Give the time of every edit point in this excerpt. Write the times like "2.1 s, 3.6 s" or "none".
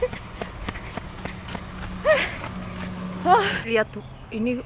3.6 s